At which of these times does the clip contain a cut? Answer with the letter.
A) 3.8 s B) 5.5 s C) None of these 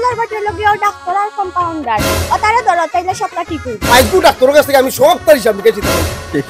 A